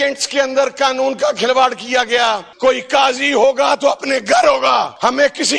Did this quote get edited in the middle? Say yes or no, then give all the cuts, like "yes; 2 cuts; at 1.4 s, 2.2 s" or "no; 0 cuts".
yes; 1 cut; at 2.5 s